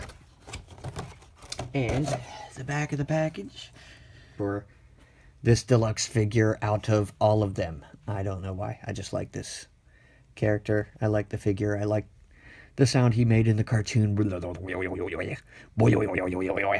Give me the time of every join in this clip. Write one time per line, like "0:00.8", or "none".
none

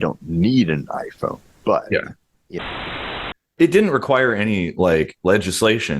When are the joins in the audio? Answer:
0:02.9

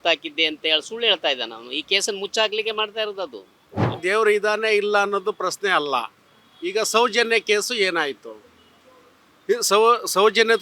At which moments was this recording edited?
0:04.0

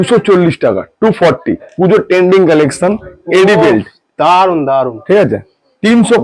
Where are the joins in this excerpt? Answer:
0:01.7

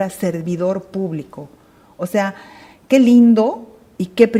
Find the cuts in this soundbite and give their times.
none

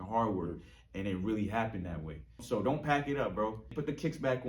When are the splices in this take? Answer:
0:02.4
0:03.7

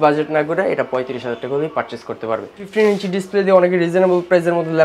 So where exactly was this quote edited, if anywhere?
0:02.6

